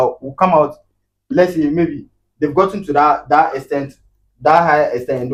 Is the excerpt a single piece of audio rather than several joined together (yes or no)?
yes